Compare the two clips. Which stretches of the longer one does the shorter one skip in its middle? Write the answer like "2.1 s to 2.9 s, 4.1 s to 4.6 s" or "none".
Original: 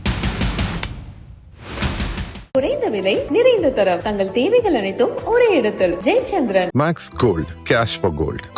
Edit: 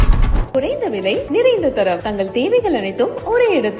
none